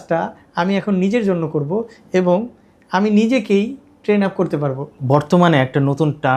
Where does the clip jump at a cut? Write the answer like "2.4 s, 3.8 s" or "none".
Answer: 5.0 s